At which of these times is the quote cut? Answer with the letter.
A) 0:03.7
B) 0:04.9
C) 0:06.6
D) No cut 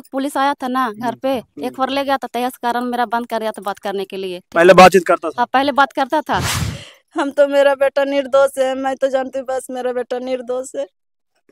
C